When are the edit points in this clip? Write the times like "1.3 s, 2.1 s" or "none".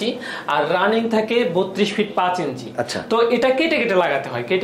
none